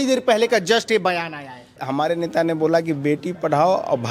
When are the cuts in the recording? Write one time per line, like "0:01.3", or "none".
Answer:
0:01.8